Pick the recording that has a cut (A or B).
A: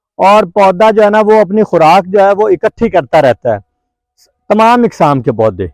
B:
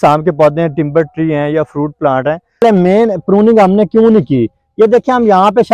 B